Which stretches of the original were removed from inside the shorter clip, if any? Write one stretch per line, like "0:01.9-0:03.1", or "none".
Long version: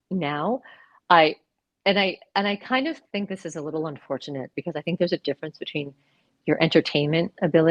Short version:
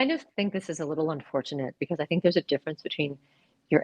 none